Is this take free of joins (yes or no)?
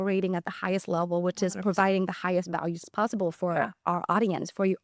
no